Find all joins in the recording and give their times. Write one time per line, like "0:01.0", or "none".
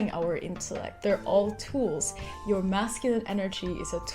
0:00.9